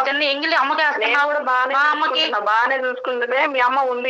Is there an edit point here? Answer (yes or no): no